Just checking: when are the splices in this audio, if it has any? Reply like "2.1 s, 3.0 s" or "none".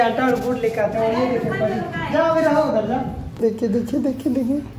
3.2 s